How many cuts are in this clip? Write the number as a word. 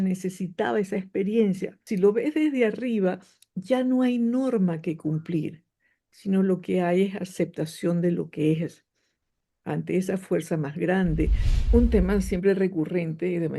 two